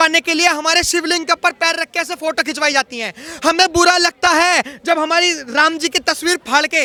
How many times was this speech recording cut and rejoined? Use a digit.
0